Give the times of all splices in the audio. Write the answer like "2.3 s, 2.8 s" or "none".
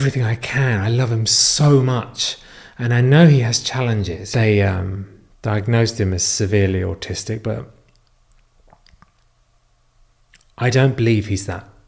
4.2 s